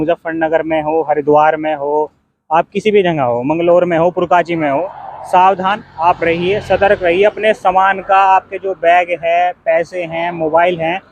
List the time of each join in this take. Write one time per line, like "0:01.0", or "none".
none